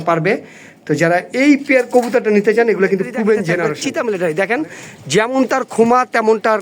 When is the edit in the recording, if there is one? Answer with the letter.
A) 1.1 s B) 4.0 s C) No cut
B